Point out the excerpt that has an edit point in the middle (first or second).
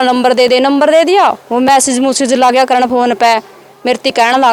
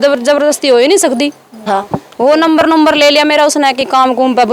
second